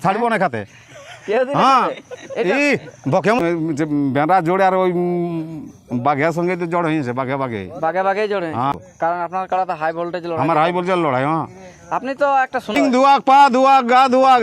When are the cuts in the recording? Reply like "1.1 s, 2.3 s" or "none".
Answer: 3.4 s, 8.7 s, 12.8 s